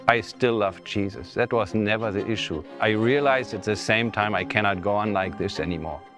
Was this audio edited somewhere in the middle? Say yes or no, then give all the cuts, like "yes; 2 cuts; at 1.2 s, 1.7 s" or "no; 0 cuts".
yes; 1 cut; at 2.7 s